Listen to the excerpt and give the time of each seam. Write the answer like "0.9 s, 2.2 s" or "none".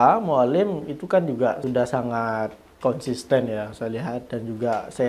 1.6 s